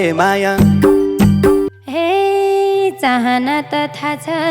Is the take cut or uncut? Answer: cut